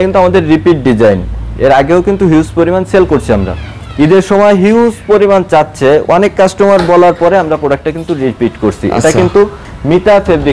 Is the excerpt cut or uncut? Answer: uncut